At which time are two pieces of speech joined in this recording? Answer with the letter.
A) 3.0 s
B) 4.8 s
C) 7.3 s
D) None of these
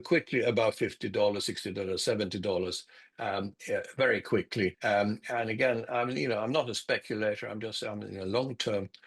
B